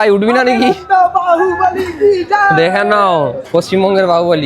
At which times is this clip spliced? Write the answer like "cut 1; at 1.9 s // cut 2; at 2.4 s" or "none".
none